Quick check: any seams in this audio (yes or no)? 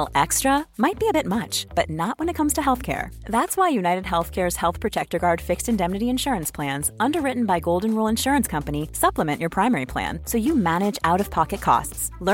no